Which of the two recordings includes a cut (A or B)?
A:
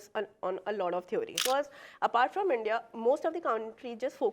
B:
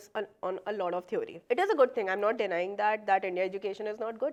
A